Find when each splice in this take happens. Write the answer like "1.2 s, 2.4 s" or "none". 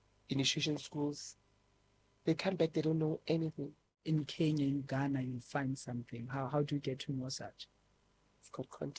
3.9 s